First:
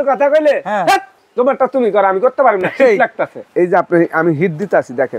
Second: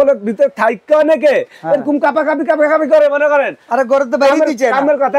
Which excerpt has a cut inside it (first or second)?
first